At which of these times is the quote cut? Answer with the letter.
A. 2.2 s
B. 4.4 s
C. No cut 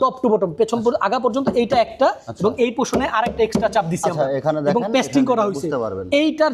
C